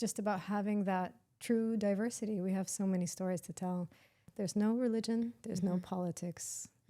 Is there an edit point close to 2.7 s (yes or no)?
no